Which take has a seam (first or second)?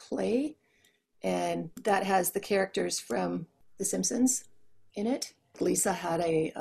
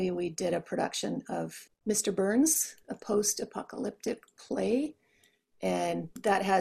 first